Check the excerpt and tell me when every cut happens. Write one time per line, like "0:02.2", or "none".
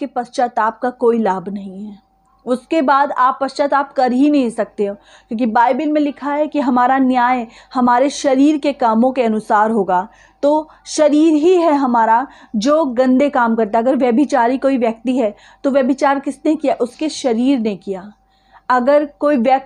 none